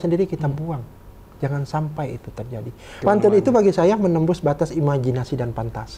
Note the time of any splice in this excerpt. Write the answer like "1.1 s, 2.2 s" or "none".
3.0 s